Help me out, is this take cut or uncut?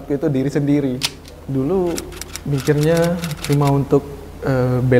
cut